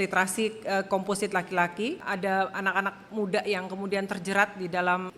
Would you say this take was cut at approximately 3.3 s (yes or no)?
no